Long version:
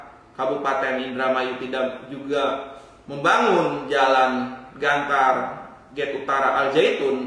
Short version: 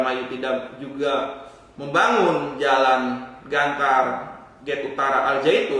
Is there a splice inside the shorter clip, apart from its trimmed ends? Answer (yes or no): no